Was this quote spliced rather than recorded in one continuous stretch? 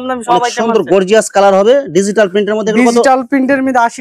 no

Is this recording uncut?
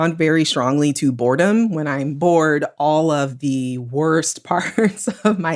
yes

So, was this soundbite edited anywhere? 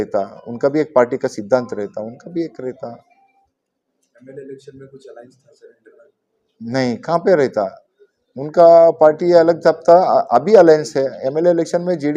no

